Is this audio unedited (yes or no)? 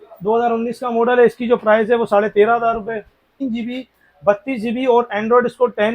no